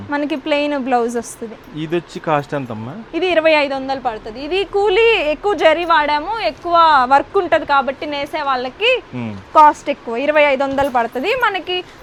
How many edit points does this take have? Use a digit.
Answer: 0